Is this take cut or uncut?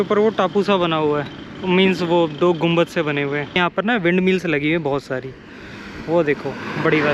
cut